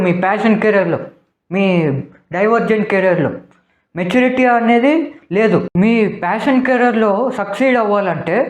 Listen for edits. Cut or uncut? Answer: cut